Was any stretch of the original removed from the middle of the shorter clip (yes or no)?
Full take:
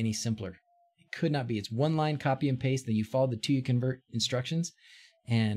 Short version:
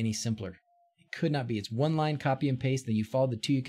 no